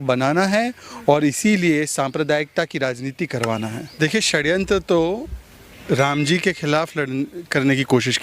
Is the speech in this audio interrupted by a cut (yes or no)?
yes